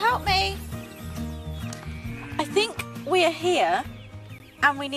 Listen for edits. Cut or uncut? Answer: cut